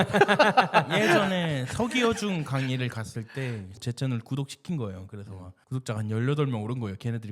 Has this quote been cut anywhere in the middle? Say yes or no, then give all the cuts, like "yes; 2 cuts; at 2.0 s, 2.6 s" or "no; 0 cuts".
yes; 1 cut; at 3.8 s